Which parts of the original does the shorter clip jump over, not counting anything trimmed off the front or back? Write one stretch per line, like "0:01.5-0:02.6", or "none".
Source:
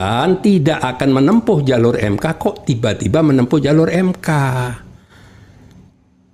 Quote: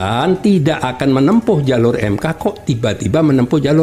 none